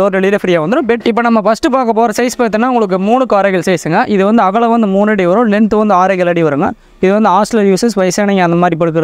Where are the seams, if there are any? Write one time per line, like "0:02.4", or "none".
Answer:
0:01.0